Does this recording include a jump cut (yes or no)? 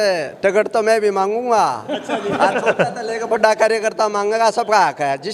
no